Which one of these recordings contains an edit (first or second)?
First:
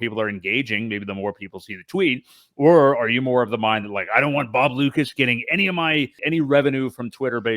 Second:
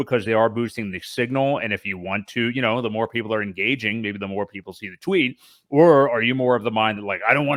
first